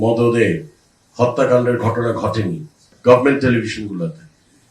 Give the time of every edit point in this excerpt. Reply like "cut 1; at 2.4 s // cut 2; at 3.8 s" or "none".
cut 1; at 2.9 s